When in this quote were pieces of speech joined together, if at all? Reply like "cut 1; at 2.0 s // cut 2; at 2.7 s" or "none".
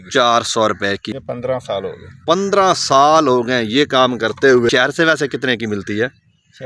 cut 1; at 1.1 s // cut 2; at 4.7 s